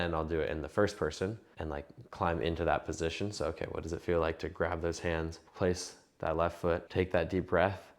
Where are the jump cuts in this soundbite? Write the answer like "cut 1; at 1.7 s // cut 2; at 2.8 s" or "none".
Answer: cut 1; at 1.5 s // cut 2; at 5.4 s // cut 3; at 6.9 s